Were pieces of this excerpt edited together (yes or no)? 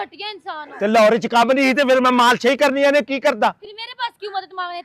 no